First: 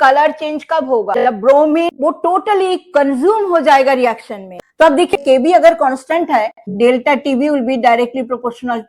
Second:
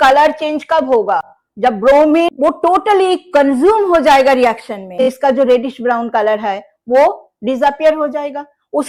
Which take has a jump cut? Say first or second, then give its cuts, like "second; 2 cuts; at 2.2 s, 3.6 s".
first; 2 cuts; at 1.1 s, 4.4 s